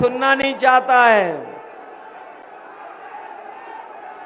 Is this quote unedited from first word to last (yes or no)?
yes